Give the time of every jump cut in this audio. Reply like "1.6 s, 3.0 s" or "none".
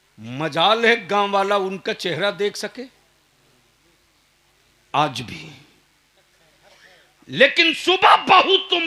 none